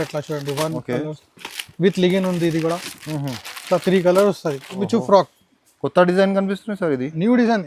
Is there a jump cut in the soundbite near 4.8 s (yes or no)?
yes